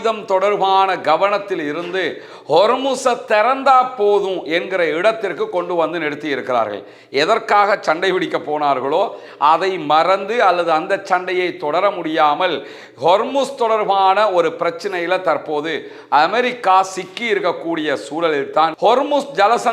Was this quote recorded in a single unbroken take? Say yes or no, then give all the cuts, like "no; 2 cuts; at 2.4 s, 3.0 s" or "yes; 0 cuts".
no; 1 cut; at 18.8 s